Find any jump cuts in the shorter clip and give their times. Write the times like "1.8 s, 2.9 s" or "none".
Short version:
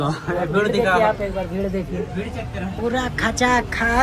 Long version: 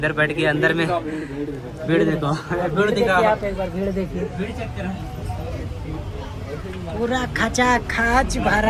2.8 s